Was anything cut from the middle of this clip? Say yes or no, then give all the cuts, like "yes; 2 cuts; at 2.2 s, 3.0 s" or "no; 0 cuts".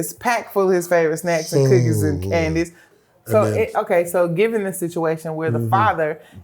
yes; 1 cut; at 2.8 s